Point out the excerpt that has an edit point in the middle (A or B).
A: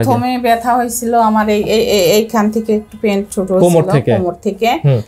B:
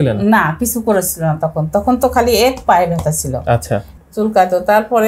B